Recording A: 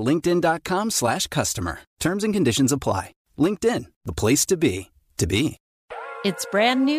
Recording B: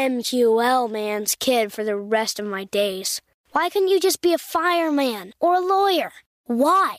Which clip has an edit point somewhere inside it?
A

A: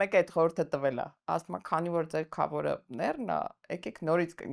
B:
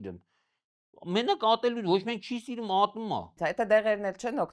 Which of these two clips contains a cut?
B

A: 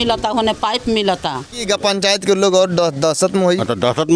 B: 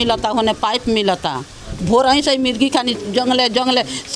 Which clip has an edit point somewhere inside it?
A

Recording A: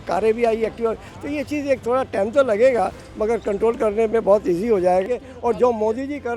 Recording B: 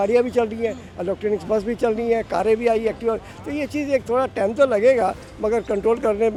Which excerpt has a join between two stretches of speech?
A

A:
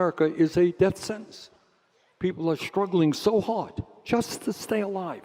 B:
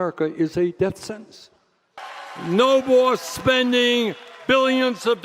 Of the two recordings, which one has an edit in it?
B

